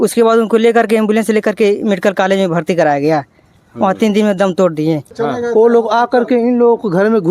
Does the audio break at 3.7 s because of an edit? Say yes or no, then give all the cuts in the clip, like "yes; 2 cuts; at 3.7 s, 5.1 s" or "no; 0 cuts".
no; 1 cut; at 5.1 s